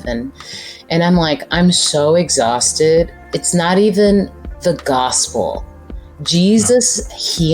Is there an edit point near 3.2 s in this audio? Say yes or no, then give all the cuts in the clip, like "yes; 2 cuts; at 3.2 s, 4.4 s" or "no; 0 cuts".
yes; 2 cuts; at 3.2 s, 4.4 s